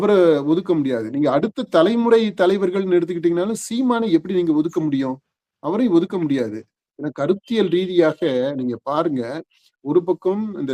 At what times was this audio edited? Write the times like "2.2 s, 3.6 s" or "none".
none